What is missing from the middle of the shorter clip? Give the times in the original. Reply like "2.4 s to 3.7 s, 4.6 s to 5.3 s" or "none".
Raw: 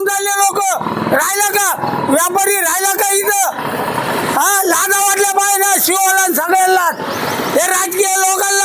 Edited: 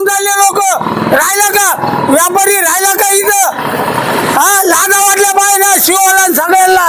none